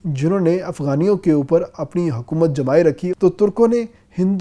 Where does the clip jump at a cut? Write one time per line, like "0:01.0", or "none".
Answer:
0:03.1